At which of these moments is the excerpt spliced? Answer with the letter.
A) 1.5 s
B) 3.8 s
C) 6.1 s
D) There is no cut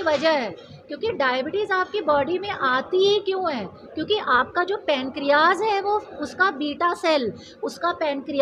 D